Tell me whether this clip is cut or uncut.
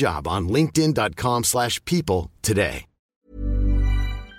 cut